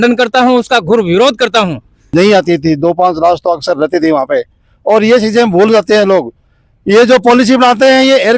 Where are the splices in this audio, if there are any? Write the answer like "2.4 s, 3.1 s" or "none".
2.1 s